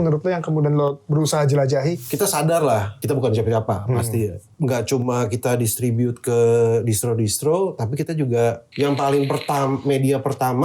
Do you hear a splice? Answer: yes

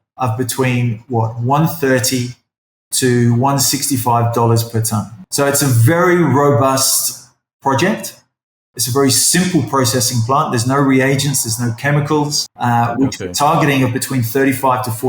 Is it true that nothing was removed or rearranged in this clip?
no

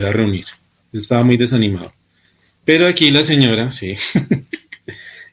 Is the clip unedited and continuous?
yes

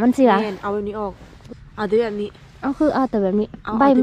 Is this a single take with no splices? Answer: no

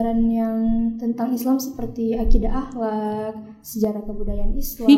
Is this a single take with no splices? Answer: yes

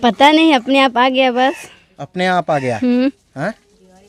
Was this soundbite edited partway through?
no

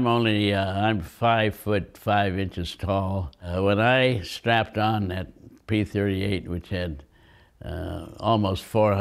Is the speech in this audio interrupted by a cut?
yes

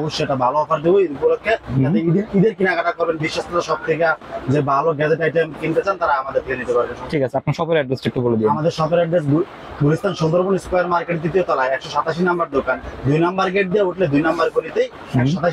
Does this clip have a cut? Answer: no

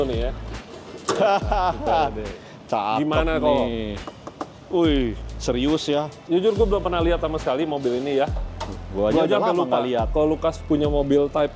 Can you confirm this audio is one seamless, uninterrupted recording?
no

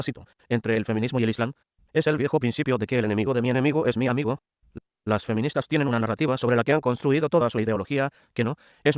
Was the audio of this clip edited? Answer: yes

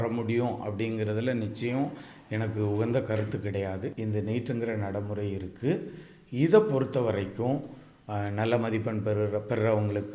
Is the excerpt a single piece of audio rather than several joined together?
no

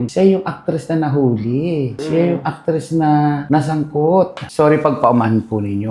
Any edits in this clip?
no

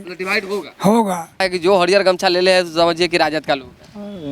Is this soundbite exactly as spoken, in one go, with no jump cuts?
no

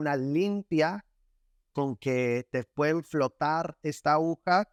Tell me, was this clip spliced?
no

